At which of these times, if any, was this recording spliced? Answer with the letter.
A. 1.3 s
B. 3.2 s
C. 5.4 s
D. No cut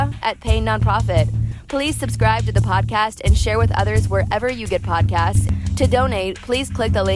C